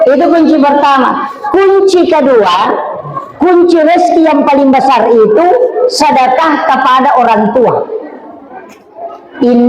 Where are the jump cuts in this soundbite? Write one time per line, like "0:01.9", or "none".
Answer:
none